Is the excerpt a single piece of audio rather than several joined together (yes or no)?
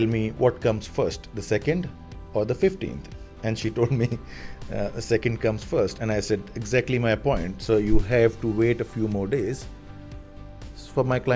yes